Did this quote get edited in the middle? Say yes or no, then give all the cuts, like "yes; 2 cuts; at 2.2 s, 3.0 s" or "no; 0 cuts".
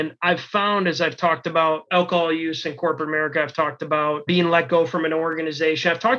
yes; 2 cuts; at 1.8 s, 4.2 s